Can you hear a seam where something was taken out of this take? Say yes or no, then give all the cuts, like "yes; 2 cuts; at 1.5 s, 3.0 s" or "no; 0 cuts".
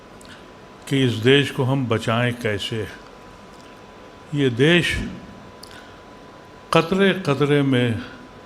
no; 0 cuts